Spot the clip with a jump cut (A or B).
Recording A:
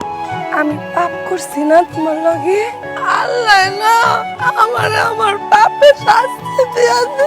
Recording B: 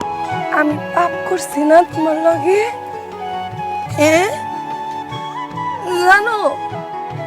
A